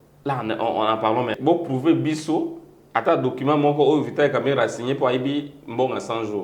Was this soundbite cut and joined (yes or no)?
yes